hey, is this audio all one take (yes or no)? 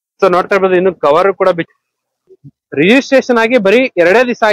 no